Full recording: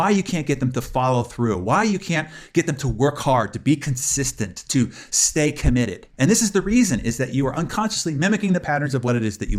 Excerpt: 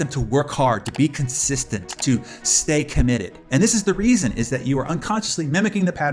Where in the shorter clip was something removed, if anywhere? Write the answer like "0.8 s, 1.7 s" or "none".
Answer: none